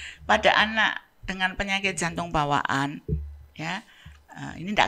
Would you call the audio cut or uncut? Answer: uncut